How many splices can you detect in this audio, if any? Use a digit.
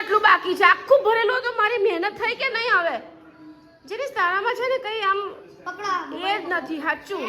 0